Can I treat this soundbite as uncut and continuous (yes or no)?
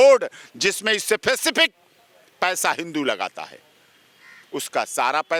yes